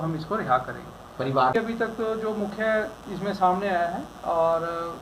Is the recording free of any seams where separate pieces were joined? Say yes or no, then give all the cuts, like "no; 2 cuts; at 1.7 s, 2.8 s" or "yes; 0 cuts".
no; 1 cut; at 1.5 s